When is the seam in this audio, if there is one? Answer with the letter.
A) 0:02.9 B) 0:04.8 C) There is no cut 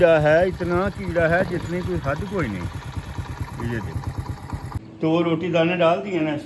B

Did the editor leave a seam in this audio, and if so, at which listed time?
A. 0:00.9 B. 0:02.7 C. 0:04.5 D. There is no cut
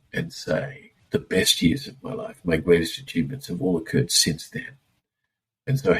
A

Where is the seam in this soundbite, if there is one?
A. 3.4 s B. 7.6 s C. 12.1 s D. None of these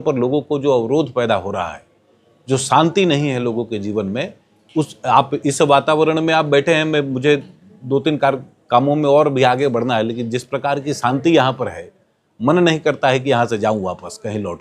D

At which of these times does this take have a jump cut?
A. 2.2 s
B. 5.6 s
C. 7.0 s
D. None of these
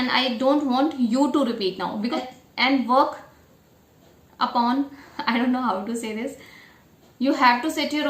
A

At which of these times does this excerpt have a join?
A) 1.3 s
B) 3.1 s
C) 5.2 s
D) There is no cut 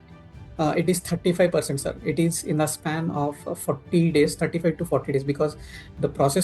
D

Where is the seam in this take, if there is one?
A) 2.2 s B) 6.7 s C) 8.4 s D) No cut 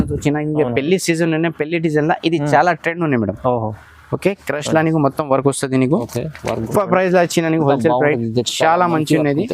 B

